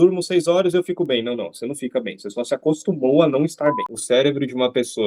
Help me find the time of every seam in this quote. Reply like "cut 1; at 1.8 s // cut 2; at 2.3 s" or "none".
cut 1; at 3.9 s